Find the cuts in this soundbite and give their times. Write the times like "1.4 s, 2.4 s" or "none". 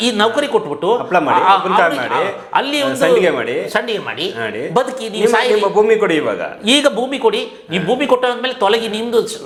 none